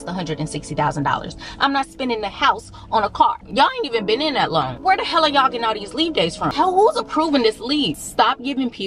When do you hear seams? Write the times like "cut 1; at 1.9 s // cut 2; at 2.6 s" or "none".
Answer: cut 1; at 3.4 s // cut 2; at 4.7 s // cut 3; at 6.5 s // cut 4; at 8.0 s